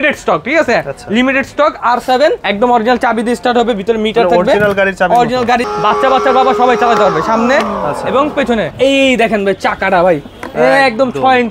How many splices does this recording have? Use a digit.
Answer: 3